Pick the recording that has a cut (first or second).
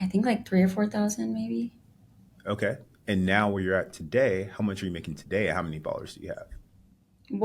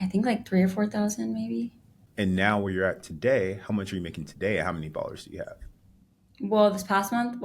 second